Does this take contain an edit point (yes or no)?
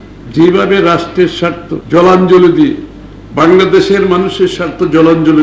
yes